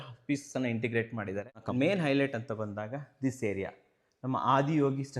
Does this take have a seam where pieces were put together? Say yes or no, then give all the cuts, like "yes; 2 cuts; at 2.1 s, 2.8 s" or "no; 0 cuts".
yes; 1 cut; at 1.5 s